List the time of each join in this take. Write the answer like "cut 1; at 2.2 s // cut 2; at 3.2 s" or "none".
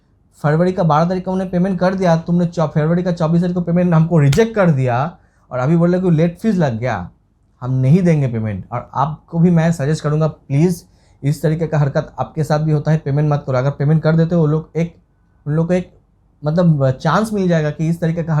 none